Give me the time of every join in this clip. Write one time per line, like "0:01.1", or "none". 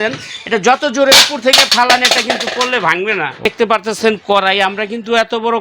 0:03.4